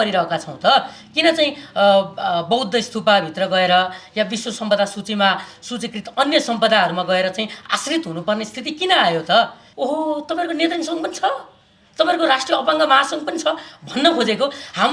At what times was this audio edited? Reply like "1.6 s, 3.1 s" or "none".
9.6 s